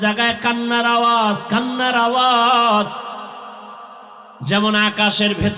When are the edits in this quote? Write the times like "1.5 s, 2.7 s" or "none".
4.3 s